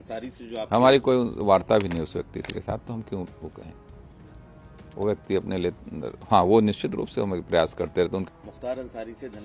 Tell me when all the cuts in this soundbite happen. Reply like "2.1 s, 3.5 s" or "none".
8.2 s